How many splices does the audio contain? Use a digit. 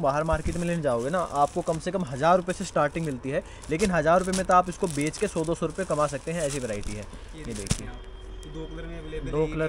0